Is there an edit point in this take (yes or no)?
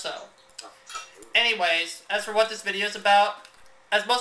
yes